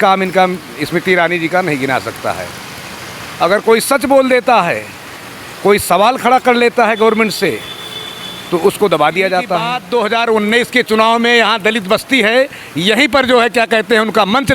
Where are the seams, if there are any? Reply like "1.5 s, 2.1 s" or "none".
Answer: 9.7 s